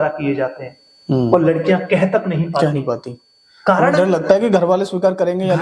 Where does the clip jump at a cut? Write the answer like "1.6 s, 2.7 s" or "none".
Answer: none